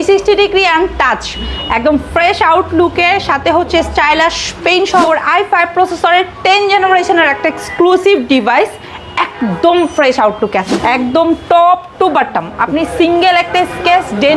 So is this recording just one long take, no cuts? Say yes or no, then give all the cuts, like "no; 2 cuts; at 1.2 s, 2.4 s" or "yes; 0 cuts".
no; 2 cuts; at 5.0 s, 10.7 s